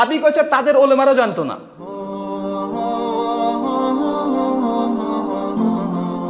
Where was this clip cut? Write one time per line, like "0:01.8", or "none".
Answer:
0:01.9